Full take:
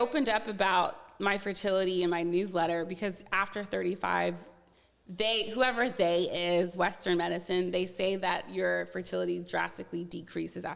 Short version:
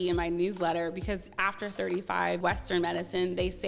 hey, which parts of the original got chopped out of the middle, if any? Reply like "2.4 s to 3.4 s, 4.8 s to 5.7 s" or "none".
4.3 s to 6.7 s